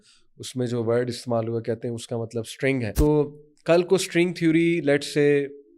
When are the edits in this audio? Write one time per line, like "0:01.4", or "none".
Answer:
0:02.9